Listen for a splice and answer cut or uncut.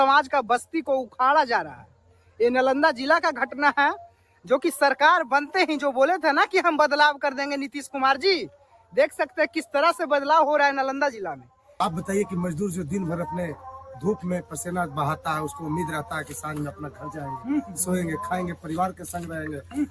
cut